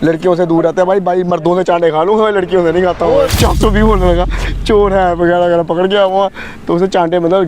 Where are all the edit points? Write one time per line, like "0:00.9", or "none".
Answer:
0:03.4

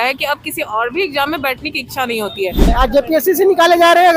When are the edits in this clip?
0:02.7

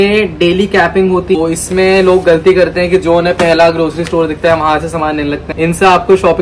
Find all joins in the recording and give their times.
0:01.4
0:05.5

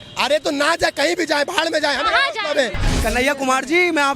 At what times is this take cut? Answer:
0:02.9

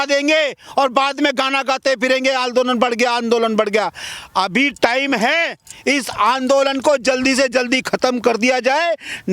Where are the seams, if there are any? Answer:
none

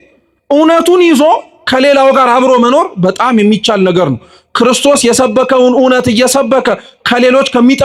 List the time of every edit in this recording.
none

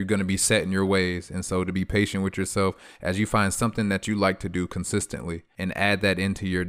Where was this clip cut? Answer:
0:05.4

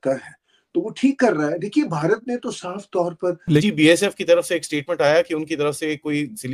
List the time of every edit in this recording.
0:03.6

